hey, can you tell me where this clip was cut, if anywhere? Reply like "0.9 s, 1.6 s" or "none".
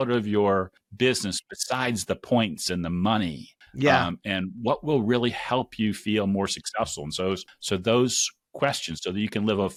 none